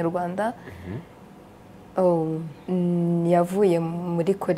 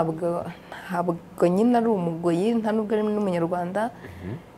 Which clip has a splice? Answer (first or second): first